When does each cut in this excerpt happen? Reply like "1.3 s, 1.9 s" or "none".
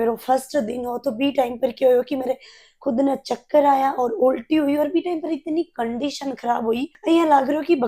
none